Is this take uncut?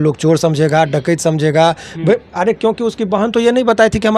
yes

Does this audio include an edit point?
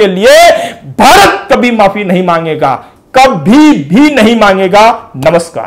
no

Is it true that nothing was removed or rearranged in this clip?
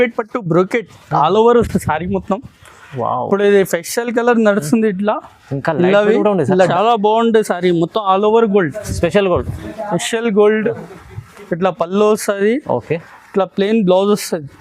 no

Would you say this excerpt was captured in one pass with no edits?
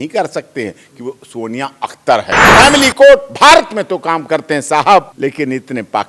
no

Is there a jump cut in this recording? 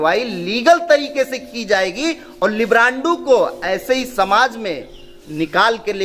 no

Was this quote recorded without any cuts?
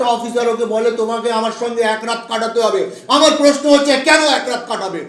yes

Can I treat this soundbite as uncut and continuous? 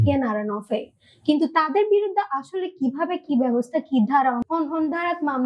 no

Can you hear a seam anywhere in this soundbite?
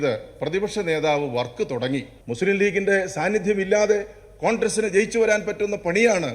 yes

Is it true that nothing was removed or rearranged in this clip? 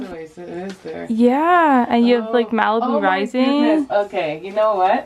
yes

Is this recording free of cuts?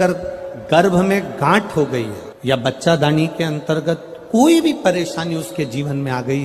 yes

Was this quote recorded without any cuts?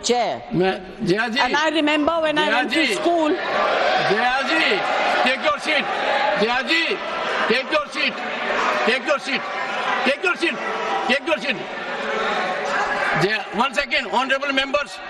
no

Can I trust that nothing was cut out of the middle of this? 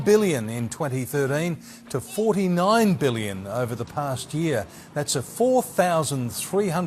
yes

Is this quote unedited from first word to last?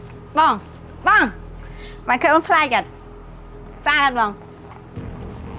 no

